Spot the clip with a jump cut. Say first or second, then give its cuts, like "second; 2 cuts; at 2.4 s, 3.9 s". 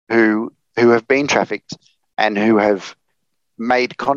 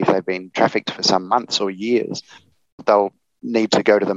second; 1 cut; at 2.8 s